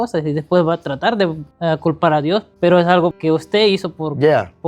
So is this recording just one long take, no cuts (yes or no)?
no